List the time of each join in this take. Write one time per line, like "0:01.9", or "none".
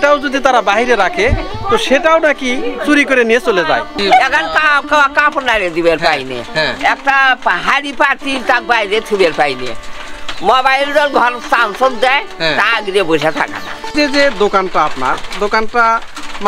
0:04.0
0:13.9